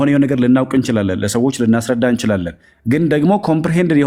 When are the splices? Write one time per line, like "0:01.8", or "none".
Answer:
none